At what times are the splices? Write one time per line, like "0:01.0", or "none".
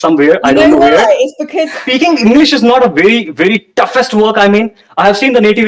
0:01.8